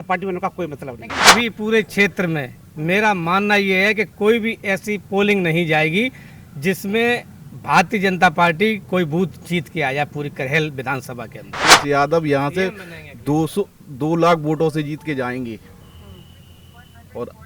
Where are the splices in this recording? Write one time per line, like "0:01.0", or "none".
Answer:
0:01.3
0:11.6